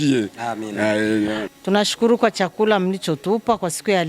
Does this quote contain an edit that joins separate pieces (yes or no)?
yes